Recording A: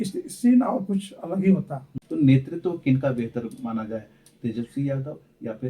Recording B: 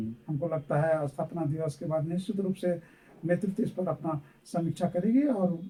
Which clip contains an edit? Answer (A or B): A